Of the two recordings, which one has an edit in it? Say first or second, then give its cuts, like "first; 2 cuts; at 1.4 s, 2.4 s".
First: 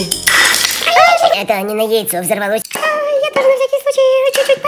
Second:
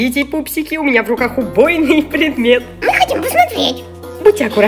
first; 2 cuts; at 1.3 s, 2.7 s